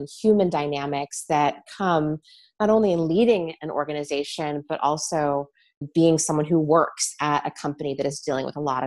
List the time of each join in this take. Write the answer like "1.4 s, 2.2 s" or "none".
none

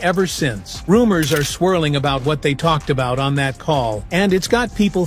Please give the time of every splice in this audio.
none

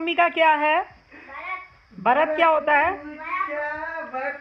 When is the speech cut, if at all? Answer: none

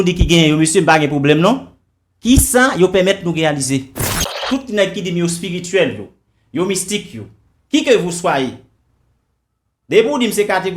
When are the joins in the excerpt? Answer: 4.4 s

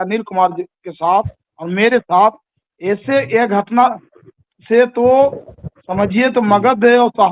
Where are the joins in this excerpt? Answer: none

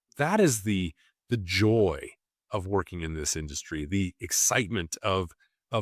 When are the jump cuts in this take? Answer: none

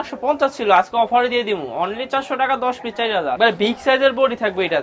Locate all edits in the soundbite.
3.4 s

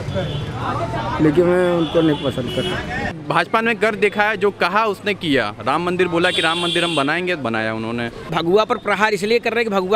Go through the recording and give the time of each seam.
3.1 s, 8.3 s

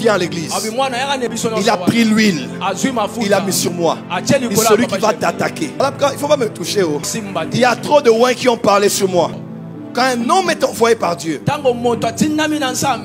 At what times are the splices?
1.3 s, 5.8 s, 7.2 s, 9.3 s

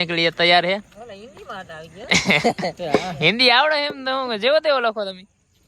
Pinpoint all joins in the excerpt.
none

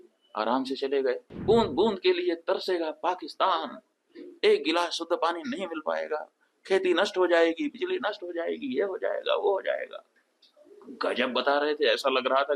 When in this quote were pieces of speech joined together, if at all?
1.3 s

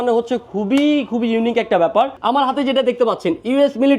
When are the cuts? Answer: 2.1 s

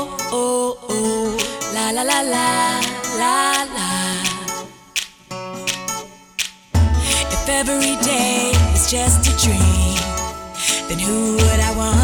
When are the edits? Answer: none

